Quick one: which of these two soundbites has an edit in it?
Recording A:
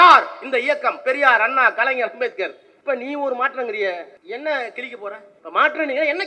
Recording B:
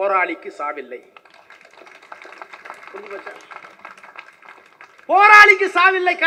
A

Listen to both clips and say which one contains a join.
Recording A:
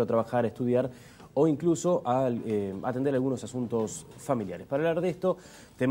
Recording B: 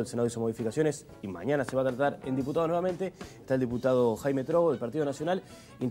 B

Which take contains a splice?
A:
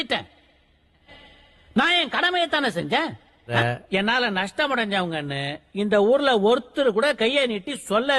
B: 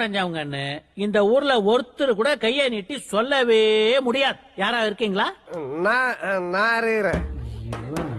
B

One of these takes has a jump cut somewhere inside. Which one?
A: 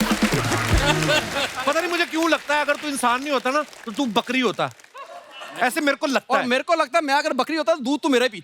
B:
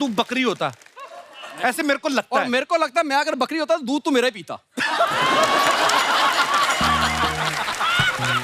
A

